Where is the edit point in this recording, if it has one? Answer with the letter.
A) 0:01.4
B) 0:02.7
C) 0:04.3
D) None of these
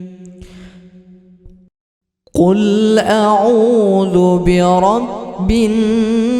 A